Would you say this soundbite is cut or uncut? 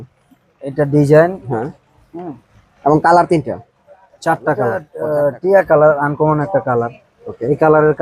cut